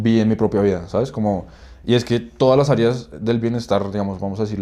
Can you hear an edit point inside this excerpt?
no; 0 cuts

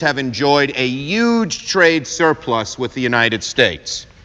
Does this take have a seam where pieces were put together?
no; 0 cuts

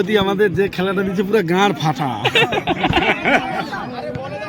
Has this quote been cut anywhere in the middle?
no; 0 cuts

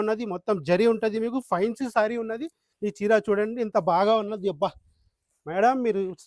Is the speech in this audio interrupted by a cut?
yes; 1 cut; at 2.6 s

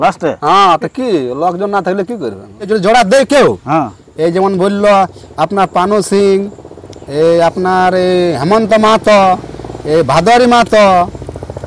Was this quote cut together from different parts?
yes; 1 cut; at 2.7 s

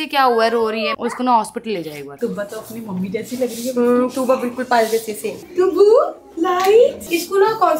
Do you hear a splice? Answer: yes; 3 cuts; at 0.9 s, 2.1 s, 5.2 s

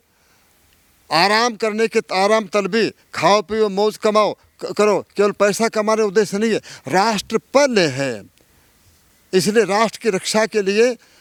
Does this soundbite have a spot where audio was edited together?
no; 0 cuts

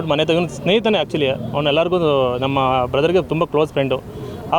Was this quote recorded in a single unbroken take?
yes; 0 cuts

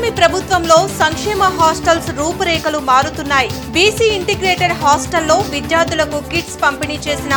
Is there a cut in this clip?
no; 0 cuts

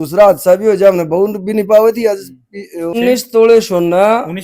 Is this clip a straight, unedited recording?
no; 1 cut; at 2.9 s

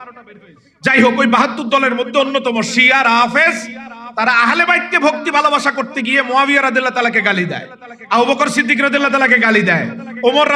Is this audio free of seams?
yes; 0 cuts

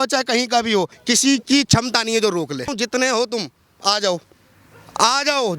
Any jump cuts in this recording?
yes; 2 cuts; at 1.0 s, 2.7 s

